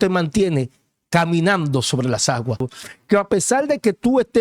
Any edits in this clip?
yes; 1 cut; at 2.7 s

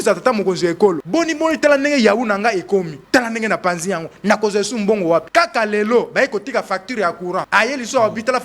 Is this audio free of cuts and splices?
no; 4 cuts; at 1.0 s, 3.0 s, 5.3 s, 7.5 s

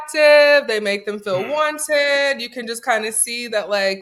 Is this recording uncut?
yes; 0 cuts

